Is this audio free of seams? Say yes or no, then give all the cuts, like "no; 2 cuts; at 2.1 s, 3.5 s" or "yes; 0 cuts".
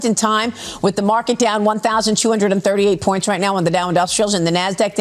yes; 0 cuts